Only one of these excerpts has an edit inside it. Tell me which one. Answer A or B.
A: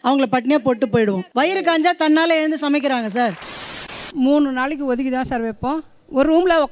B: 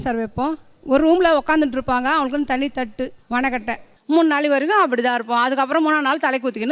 A